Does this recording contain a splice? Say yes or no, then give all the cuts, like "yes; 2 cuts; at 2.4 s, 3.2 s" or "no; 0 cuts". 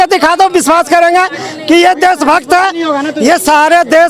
no; 0 cuts